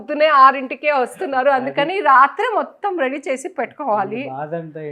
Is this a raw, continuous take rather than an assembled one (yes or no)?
yes